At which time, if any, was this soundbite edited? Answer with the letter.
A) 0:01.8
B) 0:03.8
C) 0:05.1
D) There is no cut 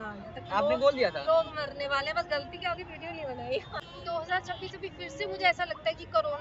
B